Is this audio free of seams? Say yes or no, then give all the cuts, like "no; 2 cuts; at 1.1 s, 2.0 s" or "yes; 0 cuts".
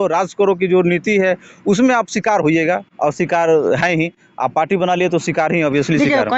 yes; 0 cuts